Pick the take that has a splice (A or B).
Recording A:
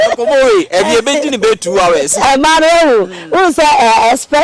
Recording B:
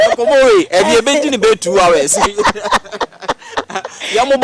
A